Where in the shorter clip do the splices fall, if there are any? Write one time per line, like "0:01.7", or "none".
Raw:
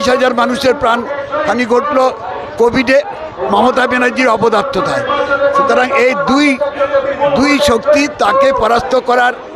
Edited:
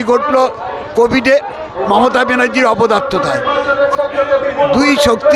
0:03.9

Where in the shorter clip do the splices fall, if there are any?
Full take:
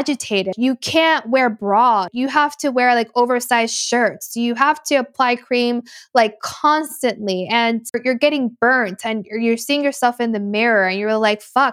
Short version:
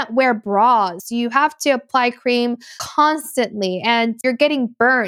0:00.9
0:02.7
0:04.2

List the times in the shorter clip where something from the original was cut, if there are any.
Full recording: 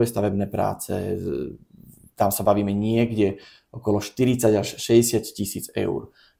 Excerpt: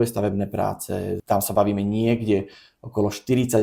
0:01.2

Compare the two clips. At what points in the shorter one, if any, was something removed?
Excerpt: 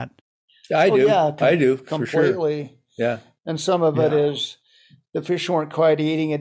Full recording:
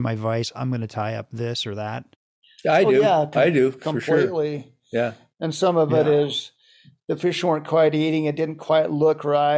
none

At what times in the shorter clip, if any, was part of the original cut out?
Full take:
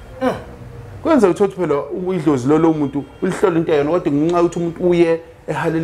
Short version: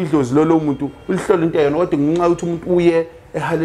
none

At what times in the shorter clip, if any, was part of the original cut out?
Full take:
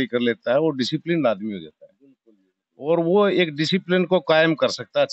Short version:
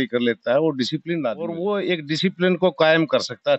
0:01.5

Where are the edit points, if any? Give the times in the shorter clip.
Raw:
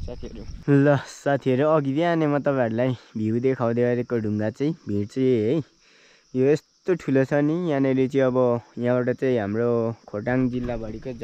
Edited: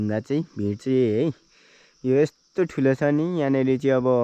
none

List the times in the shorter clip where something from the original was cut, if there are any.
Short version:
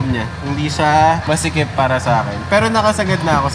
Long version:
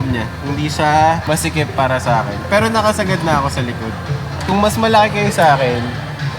none

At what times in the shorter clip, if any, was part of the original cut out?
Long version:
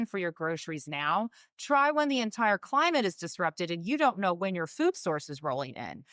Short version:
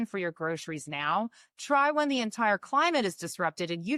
none

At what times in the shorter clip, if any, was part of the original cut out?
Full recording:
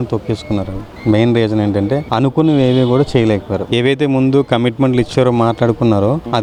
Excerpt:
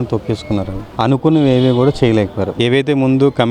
0:00.9

